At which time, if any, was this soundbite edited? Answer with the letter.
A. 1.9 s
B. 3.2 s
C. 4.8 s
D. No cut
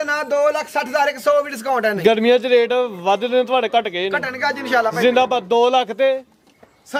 D